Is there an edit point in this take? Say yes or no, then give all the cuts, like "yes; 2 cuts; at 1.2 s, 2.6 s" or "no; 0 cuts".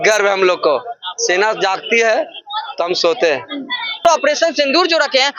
yes; 1 cut; at 4.0 s